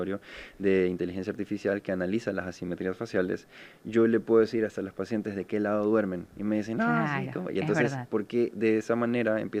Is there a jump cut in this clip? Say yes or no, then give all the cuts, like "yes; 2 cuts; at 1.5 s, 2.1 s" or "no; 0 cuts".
no; 0 cuts